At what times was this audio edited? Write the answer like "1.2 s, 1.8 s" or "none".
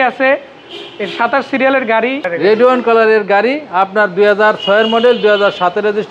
2.3 s